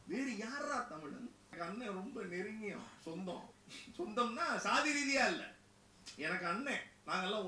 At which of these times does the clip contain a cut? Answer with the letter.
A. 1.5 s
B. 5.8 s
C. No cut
A